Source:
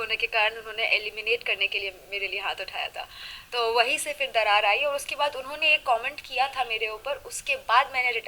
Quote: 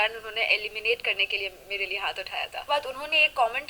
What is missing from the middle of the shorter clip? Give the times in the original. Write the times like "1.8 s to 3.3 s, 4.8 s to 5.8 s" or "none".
3.0 s to 5.1 s